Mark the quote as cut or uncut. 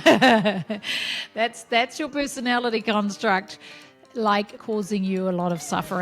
cut